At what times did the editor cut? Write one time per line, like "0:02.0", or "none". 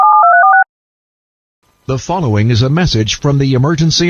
0:01.2